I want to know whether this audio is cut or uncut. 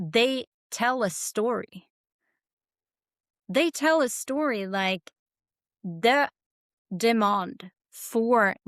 uncut